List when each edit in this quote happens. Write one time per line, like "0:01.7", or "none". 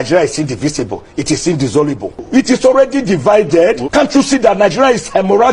0:02.2
0:03.8